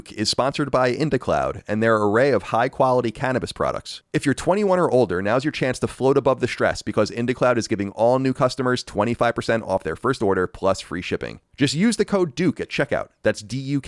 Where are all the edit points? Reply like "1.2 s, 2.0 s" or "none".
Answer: 3.9 s